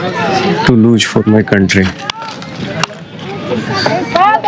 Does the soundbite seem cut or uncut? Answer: uncut